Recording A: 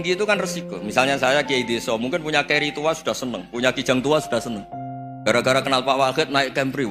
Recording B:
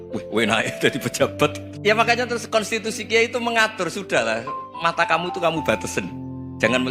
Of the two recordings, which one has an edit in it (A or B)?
B